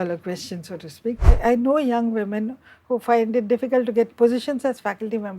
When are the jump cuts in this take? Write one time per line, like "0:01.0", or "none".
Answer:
0:01.3